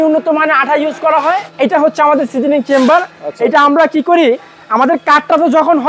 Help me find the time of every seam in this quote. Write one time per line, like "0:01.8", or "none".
0:01.5